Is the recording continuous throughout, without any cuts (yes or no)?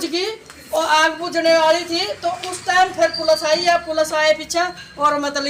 yes